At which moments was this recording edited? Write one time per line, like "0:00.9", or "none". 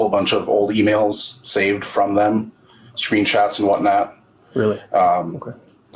none